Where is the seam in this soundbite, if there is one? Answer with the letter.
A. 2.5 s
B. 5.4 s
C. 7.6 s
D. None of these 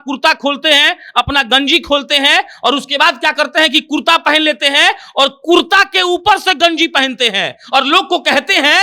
D